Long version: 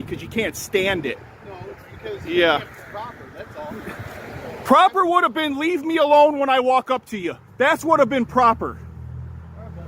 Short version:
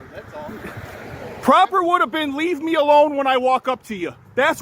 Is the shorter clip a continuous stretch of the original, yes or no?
yes